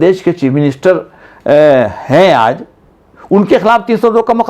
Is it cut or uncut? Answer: uncut